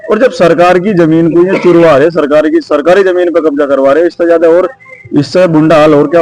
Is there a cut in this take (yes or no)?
no